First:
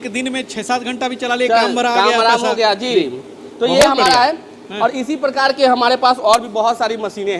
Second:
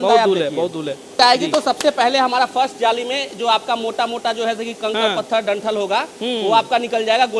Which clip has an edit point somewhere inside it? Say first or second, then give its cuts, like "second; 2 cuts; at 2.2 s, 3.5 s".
second; 1 cut; at 1.1 s